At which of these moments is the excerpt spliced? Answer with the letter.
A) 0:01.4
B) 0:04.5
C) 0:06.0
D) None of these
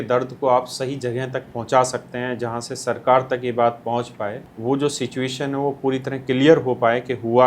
B